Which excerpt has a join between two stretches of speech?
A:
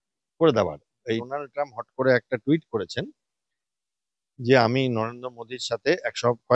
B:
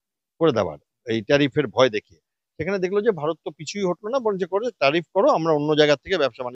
A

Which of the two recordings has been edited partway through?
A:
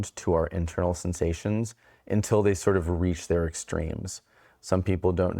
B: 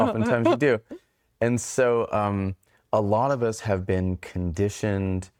A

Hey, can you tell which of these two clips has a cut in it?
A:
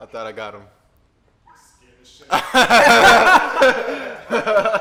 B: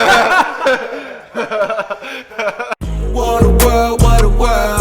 B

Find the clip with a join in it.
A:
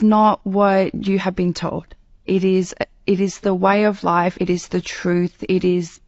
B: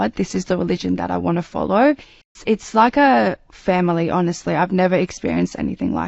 B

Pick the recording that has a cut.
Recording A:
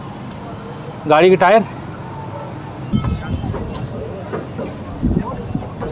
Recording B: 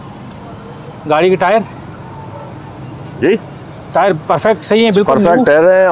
A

